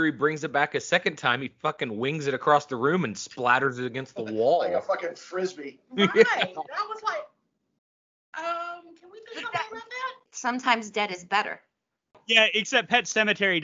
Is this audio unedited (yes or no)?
yes